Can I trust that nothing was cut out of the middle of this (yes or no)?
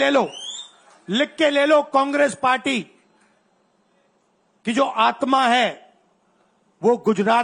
yes